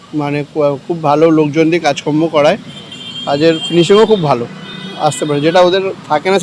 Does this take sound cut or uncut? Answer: uncut